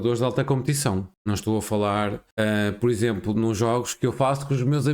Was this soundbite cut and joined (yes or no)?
yes